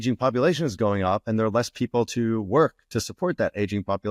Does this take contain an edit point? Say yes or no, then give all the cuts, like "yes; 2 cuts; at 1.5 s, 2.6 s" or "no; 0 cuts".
no; 0 cuts